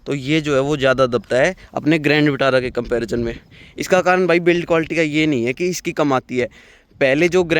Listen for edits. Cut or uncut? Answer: uncut